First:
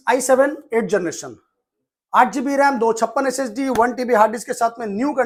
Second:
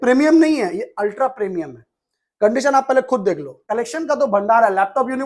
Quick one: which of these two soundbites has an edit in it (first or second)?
second